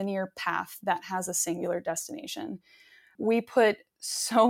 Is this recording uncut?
no; 1 cut; at 3.1 s

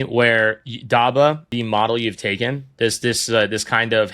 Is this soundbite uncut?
no; 1 cut; at 1.5 s

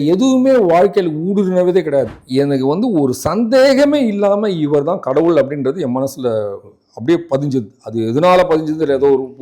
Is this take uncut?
no; 1 cut; at 2.2 s

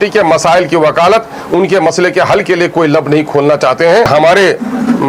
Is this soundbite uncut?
no; 1 cut; at 4.1 s

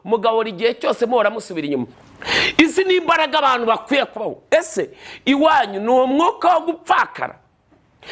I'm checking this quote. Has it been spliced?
yes; 1 cut; at 1.9 s

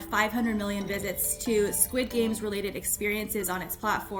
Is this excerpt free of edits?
yes; 0 cuts

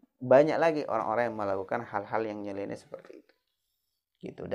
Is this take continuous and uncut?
yes; 0 cuts

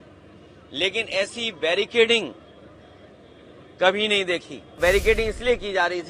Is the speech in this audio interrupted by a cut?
yes; 1 cut; at 4.8 s

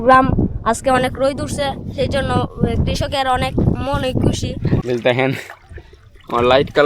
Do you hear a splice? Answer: yes; 1 cut; at 4.6 s

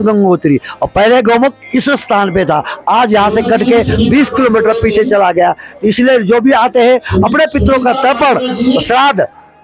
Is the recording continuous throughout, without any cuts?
yes; 0 cuts

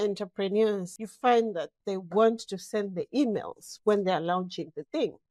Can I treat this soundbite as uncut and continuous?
no; 1 cut; at 0.9 s

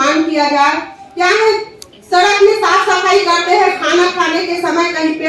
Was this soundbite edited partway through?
no; 0 cuts

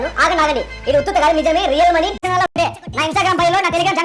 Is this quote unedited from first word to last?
no; 1 cut; at 2.2 s

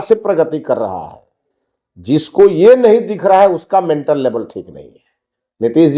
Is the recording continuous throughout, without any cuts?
yes; 0 cuts

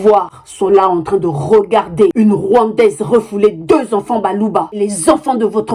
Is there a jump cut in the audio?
yes; 1 cut; at 4.7 s

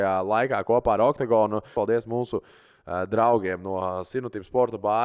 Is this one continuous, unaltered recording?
no; 1 cut; at 1.7 s

